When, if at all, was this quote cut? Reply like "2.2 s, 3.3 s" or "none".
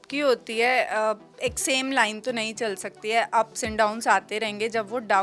none